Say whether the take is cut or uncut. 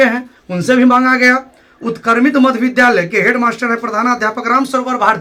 uncut